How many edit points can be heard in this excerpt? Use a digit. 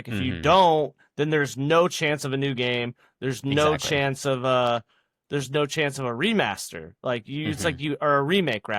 0